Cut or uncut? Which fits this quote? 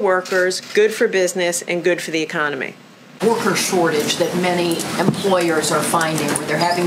cut